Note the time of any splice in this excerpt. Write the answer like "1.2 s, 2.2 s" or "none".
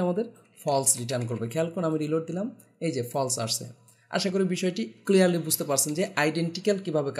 none